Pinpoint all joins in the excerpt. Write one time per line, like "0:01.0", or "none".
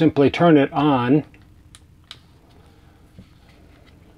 none

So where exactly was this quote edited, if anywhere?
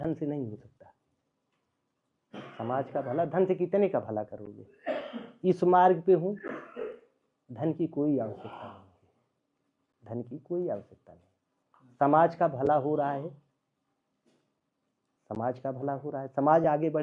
none

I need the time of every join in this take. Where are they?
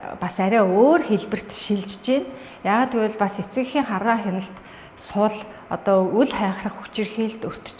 none

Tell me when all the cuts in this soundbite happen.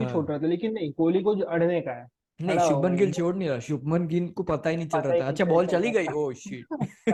none

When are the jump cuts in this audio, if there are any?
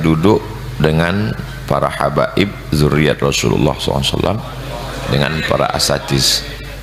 none

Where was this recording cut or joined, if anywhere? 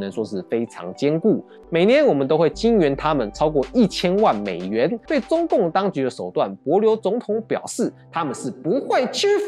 0:01.6
0:05.0

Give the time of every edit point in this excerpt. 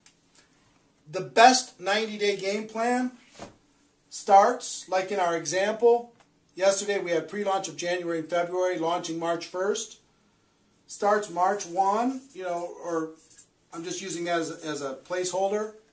0:08.5

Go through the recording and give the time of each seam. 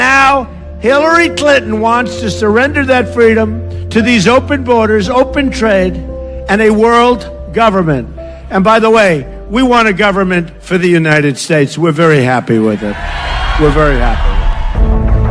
0:09.1

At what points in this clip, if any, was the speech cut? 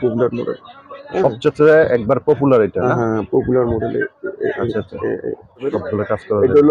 0:05.7

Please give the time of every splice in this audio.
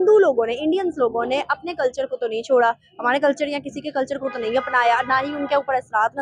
none

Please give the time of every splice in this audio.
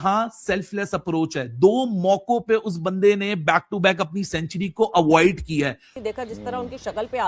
0:05.9

